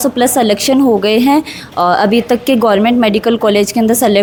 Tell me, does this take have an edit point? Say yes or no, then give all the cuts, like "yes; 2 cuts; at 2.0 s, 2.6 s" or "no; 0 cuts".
no; 0 cuts